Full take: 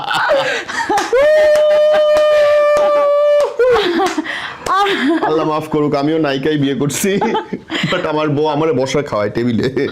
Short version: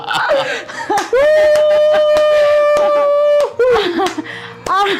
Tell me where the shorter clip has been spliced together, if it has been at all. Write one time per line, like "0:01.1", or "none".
none